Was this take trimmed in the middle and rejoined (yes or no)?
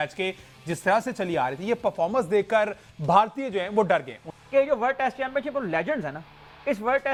no